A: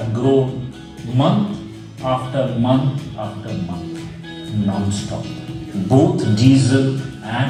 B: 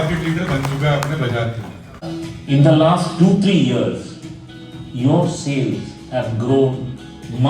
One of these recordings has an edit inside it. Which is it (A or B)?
B